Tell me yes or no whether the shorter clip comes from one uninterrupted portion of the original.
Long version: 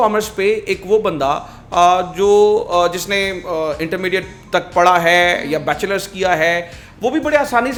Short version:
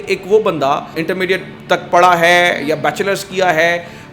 no